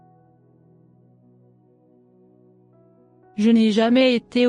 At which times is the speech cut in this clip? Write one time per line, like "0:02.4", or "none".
0:02.8